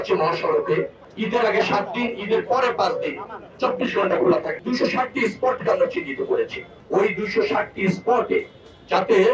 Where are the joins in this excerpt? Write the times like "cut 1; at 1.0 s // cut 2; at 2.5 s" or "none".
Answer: cut 1; at 1.0 s // cut 2; at 4.5 s // cut 3; at 6.8 s